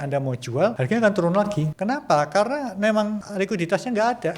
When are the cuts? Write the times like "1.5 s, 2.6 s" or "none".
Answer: 0.8 s, 1.7 s, 3.2 s